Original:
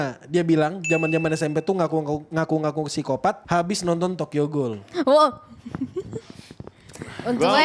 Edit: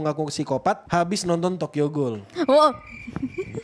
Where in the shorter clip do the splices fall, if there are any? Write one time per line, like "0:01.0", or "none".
none